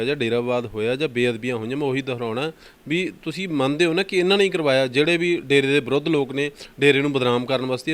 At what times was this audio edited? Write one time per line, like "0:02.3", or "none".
none